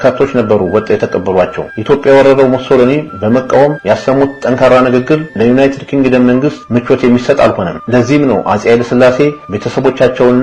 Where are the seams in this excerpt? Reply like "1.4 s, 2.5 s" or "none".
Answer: 1.7 s